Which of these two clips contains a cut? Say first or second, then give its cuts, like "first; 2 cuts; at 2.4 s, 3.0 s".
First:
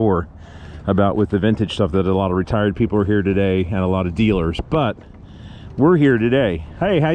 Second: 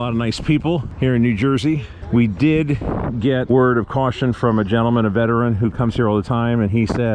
second; 3 cuts; at 0.9 s, 1.9 s, 3.5 s